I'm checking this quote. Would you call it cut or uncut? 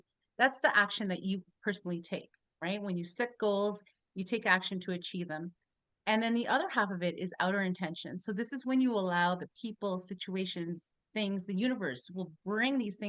uncut